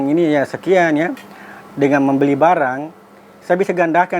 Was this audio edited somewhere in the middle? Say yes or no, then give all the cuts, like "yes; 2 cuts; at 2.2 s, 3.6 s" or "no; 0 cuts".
no; 0 cuts